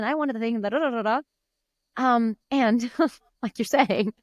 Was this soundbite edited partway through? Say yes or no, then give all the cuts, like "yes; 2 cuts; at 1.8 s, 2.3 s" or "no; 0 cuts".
no; 0 cuts